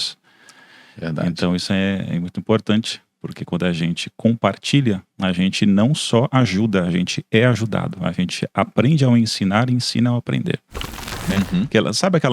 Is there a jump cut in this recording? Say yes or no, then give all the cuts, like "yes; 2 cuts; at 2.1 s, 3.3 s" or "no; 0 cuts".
yes; 1 cut; at 11.2 s